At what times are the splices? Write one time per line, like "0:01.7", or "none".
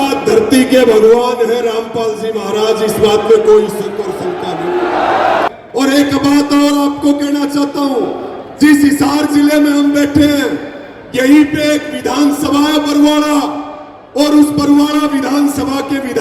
0:05.5